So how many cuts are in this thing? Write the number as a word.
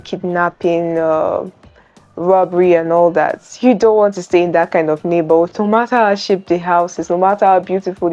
zero